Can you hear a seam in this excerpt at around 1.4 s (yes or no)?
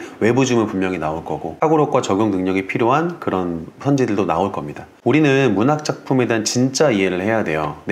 yes